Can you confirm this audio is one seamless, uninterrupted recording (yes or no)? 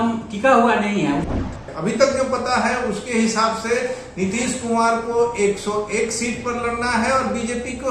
no